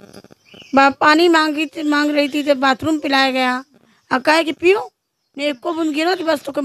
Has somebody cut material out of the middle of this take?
no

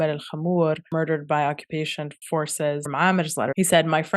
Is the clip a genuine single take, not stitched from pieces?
no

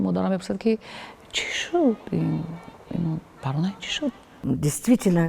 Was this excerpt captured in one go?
no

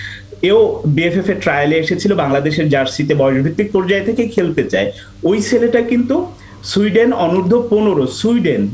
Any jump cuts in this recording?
no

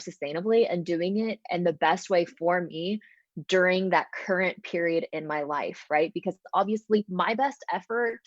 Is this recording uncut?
yes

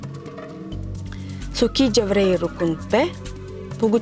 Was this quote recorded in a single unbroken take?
no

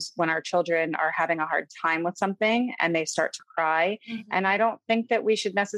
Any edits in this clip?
no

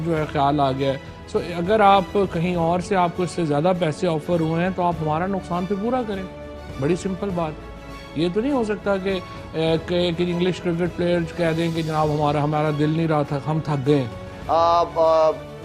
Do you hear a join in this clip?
yes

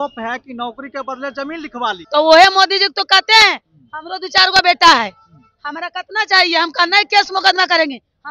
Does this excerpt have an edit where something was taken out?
yes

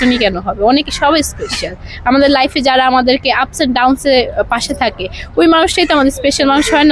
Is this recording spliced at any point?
no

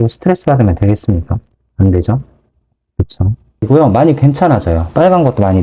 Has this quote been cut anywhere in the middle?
yes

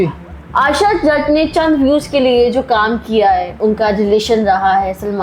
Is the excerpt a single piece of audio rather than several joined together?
no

